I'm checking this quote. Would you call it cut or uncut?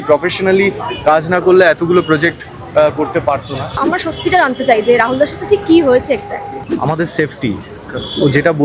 cut